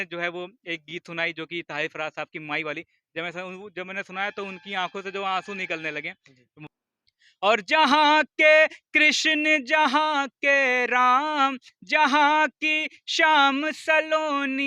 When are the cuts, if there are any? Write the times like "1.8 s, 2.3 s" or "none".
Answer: 6.7 s